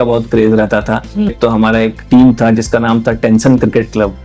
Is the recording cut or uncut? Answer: cut